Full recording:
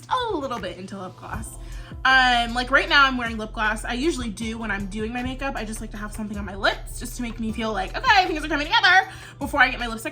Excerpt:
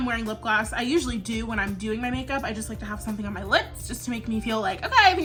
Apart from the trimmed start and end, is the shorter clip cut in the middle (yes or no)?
no